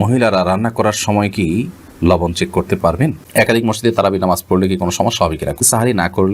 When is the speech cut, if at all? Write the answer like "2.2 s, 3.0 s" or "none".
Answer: 3.2 s, 5.6 s